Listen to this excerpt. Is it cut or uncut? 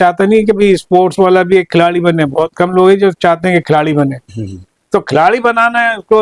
uncut